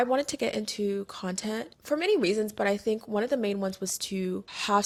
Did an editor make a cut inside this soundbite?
no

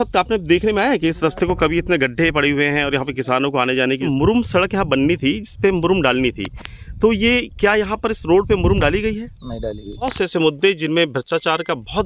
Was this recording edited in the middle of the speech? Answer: yes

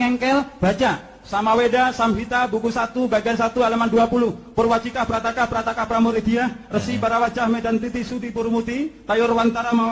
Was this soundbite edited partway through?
no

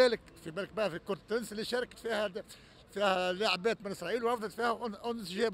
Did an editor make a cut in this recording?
no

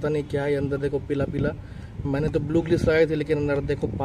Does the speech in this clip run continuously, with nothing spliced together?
yes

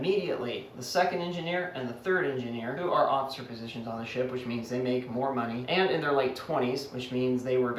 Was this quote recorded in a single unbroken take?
yes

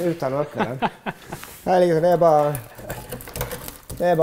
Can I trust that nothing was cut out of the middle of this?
yes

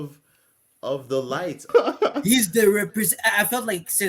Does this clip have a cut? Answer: yes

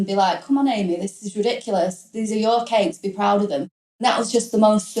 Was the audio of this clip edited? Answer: yes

